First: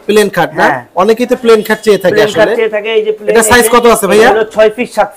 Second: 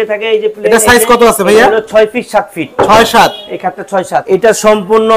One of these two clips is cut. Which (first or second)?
second